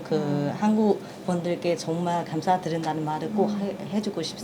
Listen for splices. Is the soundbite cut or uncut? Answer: uncut